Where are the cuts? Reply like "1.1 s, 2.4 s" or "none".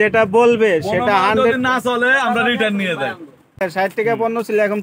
3.6 s